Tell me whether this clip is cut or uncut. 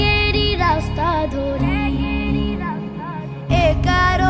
cut